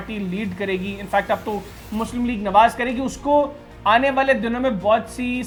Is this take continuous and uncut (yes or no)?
yes